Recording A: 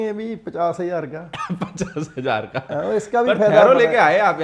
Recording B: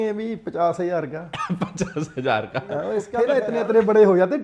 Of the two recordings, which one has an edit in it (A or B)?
B